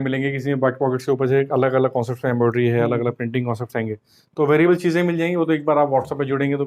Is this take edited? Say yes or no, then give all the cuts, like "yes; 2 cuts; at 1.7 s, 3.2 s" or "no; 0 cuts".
no; 0 cuts